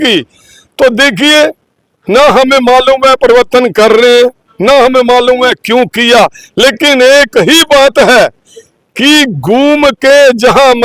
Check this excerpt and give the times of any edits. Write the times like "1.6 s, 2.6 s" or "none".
none